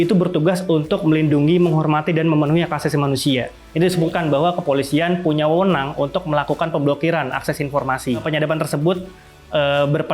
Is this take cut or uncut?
cut